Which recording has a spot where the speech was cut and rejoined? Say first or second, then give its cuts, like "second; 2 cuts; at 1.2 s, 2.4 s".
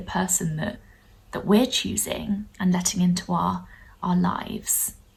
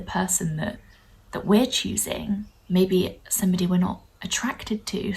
second; 1 cut; at 2.5 s